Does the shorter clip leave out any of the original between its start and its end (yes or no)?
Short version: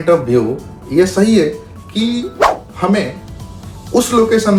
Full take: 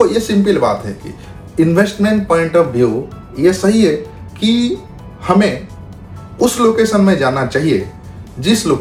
no